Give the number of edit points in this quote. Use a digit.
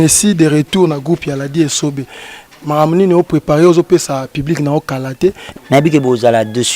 1